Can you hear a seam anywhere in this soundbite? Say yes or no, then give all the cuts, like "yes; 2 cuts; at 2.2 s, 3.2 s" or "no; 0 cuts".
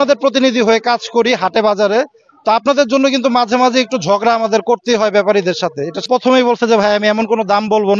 yes; 1 cut; at 6.1 s